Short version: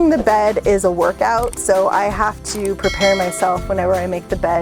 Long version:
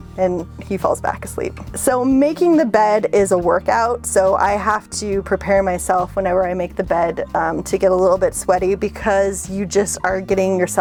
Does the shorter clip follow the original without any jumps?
yes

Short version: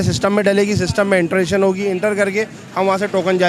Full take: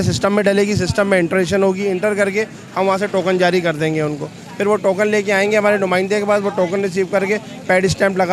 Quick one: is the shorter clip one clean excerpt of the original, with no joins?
yes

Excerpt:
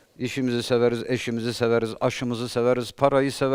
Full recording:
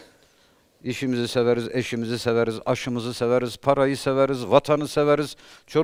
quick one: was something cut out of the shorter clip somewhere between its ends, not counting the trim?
no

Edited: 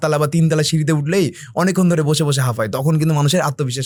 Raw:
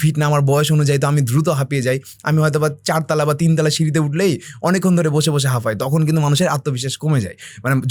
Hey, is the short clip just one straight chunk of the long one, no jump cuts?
yes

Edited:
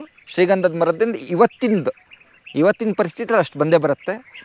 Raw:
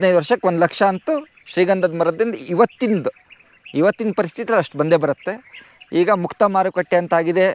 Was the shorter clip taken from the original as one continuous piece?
yes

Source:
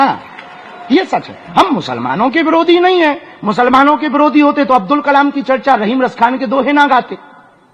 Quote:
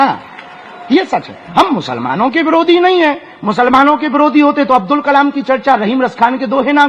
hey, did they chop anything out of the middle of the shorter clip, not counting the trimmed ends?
no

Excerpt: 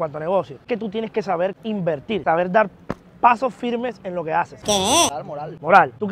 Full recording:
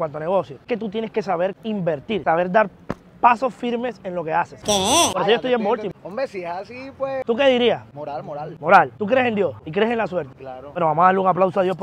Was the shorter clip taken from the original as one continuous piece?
no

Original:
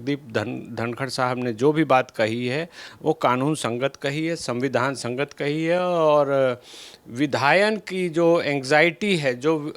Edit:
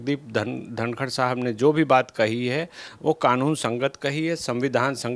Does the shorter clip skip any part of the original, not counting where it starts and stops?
no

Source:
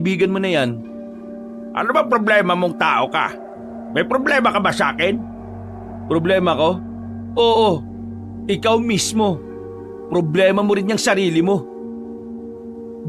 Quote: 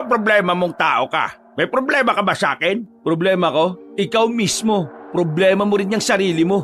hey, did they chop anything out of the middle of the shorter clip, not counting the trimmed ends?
yes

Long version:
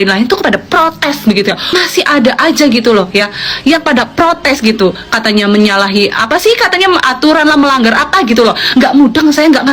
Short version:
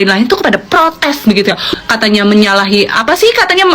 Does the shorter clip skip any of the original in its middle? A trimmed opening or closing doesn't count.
yes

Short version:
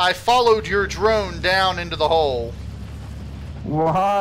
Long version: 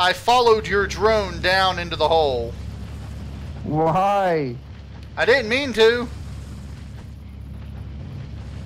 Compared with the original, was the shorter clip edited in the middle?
no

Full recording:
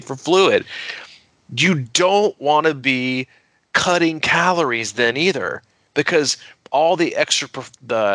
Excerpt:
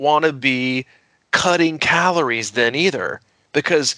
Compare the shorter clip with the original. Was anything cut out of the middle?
no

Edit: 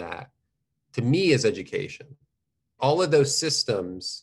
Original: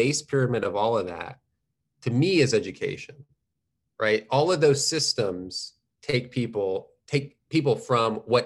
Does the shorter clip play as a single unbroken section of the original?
no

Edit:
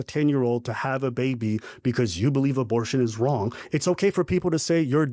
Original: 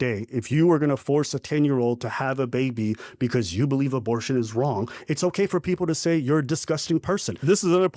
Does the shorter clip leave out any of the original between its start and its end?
no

